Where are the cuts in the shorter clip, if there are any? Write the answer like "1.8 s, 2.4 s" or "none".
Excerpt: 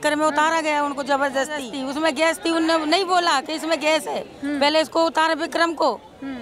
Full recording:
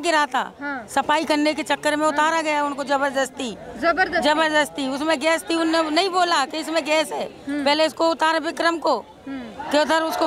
1.7 s